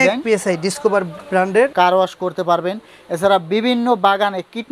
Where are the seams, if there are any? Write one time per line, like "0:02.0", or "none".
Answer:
0:01.7